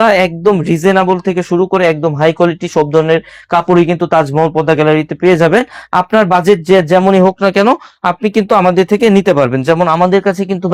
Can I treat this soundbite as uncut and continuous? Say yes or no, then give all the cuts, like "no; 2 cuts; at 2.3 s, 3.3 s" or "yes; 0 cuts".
yes; 0 cuts